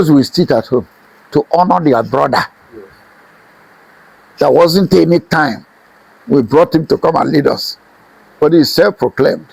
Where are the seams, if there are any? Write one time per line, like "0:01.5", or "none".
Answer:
none